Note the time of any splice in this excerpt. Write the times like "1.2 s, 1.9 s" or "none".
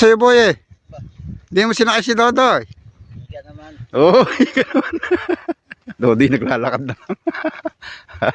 5.9 s